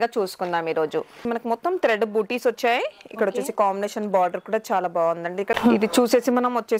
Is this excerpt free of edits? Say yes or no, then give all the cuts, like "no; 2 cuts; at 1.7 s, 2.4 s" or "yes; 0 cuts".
no; 2 cuts; at 1.2 s, 5.5 s